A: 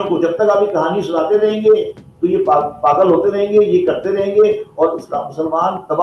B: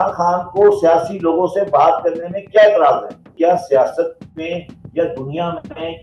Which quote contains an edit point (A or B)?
B